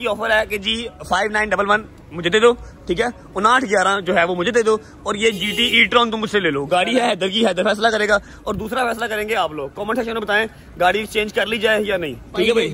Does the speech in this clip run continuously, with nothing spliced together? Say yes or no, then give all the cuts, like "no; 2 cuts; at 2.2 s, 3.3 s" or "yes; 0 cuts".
yes; 0 cuts